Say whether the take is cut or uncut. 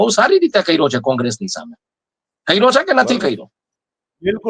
uncut